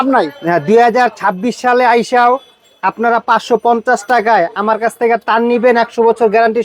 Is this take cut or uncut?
uncut